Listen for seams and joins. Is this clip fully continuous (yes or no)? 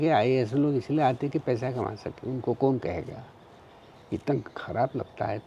yes